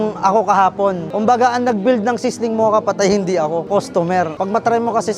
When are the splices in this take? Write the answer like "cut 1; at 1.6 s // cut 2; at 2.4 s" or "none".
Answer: cut 1; at 1.0 s